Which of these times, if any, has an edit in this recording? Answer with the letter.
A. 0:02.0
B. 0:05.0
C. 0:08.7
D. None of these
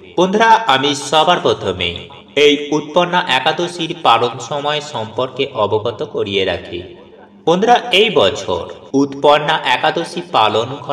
C